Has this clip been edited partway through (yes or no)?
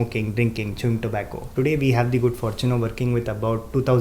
yes